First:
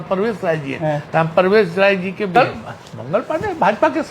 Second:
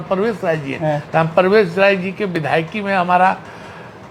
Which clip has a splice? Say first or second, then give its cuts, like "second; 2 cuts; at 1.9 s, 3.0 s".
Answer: first; 1 cut; at 2.3 s